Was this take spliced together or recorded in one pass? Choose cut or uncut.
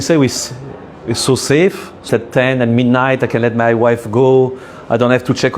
cut